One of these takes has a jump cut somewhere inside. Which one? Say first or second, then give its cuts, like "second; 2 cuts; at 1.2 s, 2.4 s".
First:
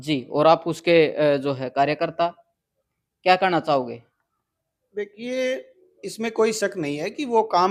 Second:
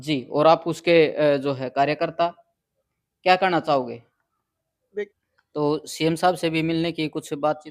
second; 1 cut; at 5.1 s